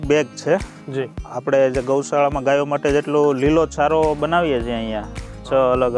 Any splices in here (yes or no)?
no